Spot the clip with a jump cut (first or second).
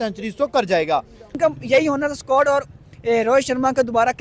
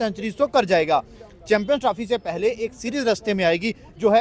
first